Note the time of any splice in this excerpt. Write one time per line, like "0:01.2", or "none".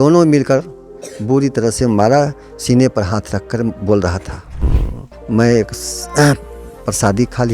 0:04.8